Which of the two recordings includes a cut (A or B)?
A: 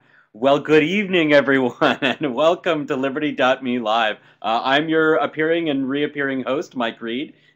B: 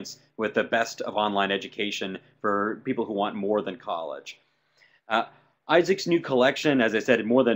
B